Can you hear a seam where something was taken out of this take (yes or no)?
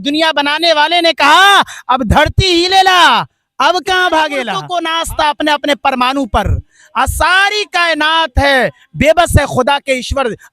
yes